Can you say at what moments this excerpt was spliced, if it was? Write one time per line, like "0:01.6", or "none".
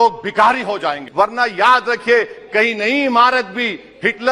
0:01.0